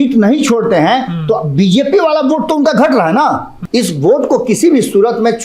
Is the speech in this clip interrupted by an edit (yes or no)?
yes